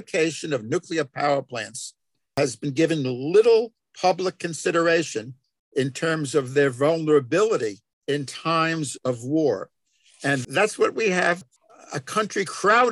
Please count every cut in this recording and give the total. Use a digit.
2